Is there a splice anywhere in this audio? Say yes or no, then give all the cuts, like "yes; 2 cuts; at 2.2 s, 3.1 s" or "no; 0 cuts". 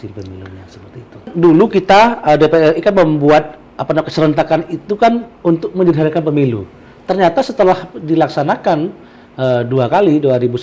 yes; 1 cut; at 1.3 s